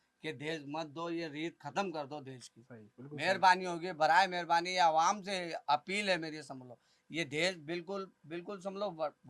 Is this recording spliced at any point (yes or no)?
no